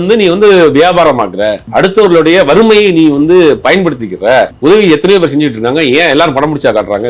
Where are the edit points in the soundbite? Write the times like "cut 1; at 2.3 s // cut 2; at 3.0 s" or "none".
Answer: cut 1; at 1.6 s // cut 2; at 4.5 s